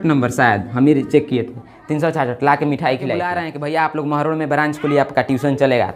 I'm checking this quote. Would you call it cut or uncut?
cut